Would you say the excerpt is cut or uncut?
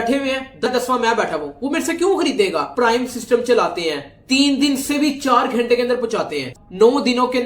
cut